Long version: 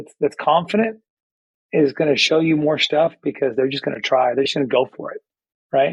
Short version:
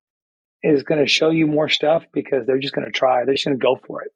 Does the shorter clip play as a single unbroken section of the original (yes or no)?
yes